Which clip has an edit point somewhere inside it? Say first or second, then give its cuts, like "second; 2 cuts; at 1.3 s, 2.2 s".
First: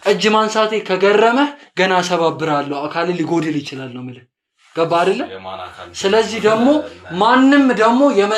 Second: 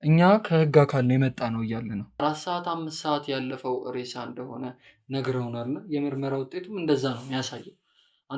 second; 1 cut; at 2.1 s